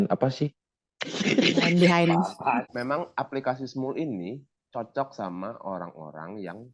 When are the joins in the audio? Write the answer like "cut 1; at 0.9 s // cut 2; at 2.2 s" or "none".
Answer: cut 1; at 2.4 s